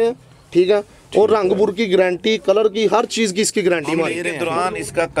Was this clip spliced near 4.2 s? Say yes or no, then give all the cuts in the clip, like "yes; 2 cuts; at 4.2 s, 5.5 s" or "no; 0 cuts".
yes; 1 cut; at 4.2 s